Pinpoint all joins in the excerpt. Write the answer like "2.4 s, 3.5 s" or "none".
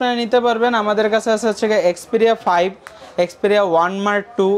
none